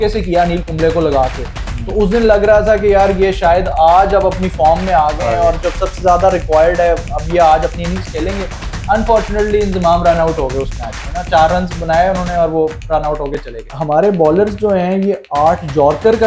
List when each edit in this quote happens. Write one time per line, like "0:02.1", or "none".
0:13.7